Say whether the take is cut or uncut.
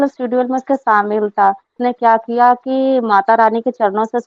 cut